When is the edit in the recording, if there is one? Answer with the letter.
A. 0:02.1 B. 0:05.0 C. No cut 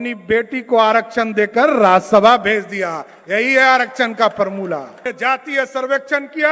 B